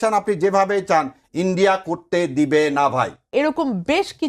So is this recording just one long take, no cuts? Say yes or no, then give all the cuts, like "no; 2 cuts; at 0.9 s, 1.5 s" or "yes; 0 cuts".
no; 1 cut; at 3.2 s